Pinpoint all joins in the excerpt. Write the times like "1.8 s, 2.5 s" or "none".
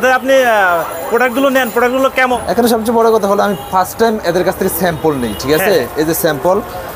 2.4 s